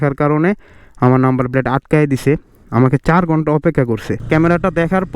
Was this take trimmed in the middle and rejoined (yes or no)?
yes